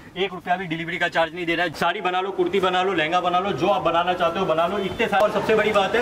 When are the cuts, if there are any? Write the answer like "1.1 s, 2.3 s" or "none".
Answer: 1.7 s, 5.2 s